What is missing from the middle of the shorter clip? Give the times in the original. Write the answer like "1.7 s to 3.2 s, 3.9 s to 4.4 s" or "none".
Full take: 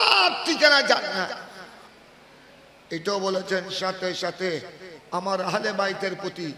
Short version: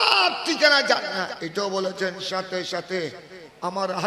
1.3 s to 2.8 s